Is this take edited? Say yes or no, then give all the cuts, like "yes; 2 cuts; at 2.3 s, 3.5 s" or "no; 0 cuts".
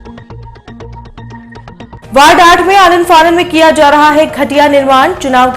yes; 1 cut; at 1.9 s